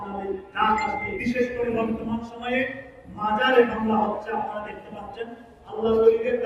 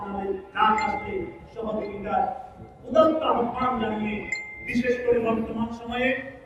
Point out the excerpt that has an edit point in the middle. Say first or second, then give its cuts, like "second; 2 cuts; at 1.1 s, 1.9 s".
first; 1 cut; at 1.1 s